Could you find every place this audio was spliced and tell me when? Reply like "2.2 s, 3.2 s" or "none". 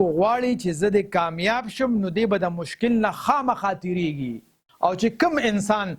4.7 s